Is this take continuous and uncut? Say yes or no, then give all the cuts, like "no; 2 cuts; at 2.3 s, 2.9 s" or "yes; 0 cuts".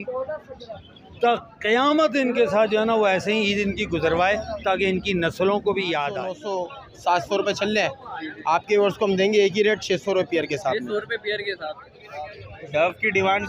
no; 2 cuts; at 6.4 s, 12.4 s